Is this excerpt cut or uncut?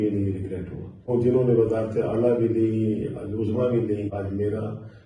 cut